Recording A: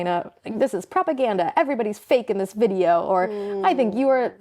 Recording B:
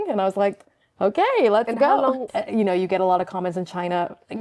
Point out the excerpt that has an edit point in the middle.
B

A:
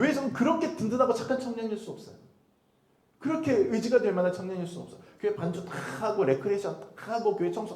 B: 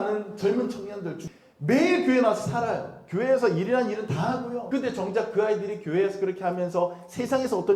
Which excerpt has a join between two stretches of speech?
B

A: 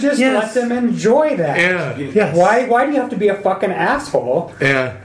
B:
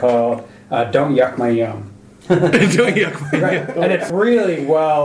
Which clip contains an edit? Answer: B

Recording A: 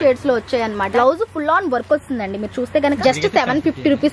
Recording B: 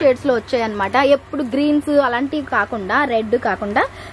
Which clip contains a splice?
A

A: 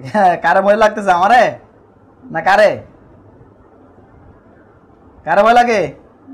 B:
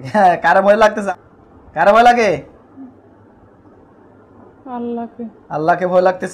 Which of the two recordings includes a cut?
B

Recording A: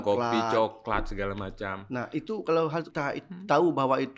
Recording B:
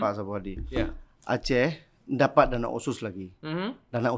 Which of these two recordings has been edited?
A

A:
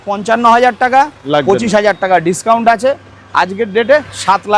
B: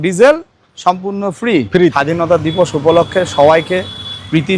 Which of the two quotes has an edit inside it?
B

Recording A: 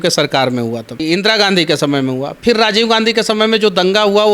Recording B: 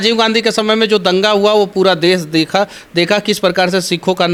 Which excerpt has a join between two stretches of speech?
A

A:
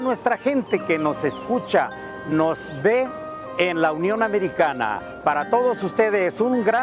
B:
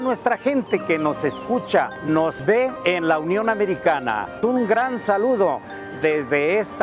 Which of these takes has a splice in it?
B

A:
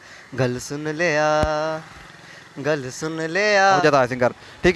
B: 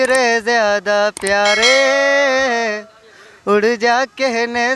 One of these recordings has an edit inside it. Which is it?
A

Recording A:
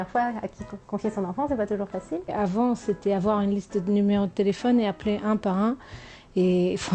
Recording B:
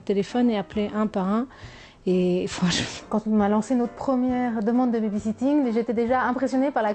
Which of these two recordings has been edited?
A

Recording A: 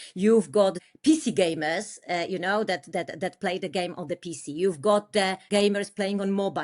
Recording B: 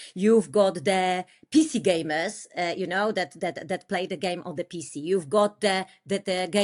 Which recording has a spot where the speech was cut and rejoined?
A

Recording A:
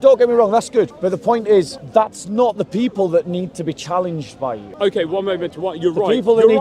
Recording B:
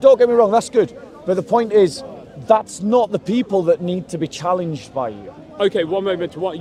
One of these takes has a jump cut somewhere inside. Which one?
A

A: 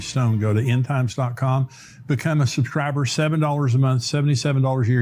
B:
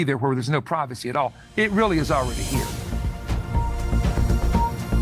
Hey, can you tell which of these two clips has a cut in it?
B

